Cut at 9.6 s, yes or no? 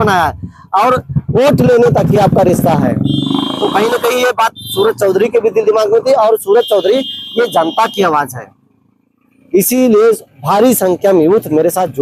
no